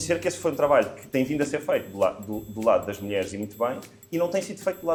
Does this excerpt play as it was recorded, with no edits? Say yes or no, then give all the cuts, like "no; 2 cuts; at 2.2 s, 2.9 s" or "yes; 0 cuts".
yes; 0 cuts